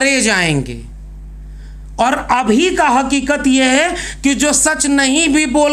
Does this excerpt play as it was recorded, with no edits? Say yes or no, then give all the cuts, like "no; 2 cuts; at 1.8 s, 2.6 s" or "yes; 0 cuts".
yes; 0 cuts